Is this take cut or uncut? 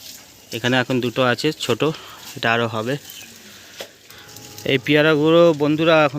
cut